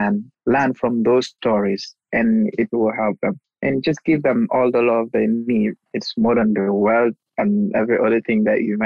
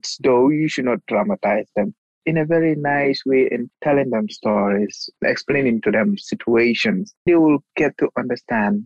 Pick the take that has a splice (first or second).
second